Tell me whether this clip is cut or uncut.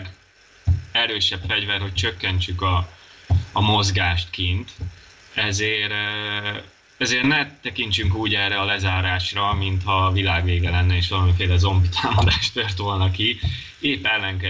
uncut